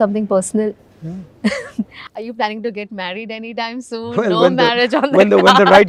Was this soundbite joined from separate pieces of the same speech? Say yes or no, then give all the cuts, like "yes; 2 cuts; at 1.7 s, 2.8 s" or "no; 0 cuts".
no; 0 cuts